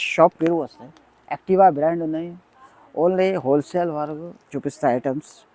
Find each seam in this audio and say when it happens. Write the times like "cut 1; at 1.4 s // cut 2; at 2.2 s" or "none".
none

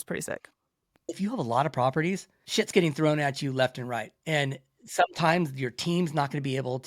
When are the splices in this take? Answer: cut 1; at 1.1 s

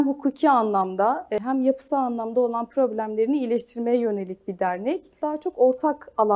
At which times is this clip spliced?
cut 1; at 1.4 s // cut 2; at 5.2 s

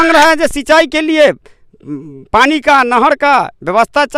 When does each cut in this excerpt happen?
none

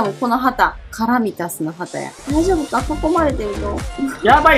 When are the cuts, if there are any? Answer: cut 1; at 2.1 s

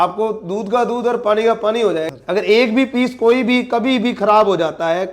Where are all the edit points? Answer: cut 1; at 2.1 s

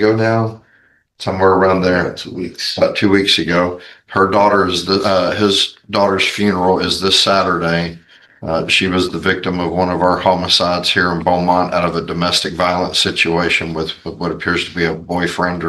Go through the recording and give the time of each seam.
none

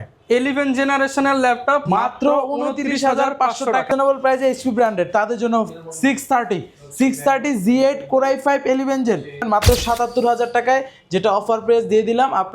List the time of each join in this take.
cut 1; at 3.9 s // cut 2; at 9.5 s

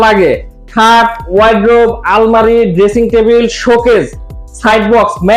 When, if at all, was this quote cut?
none

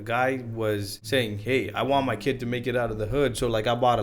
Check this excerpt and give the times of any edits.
cut 1; at 0.9 s

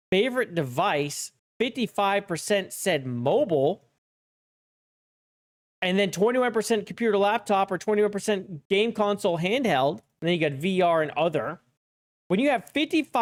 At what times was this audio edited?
none

